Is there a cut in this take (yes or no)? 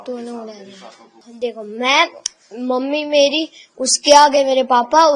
yes